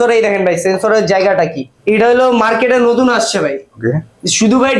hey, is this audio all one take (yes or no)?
no